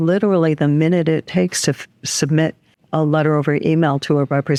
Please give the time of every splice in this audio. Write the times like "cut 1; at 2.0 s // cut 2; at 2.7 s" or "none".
none